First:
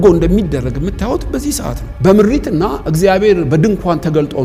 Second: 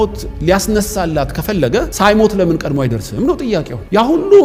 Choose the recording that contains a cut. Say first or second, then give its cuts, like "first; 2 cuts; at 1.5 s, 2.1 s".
first; 1 cut; at 1.9 s